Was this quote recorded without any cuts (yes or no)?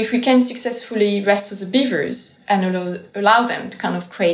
yes